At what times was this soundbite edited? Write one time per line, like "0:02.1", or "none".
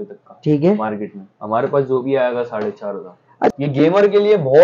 0:03.5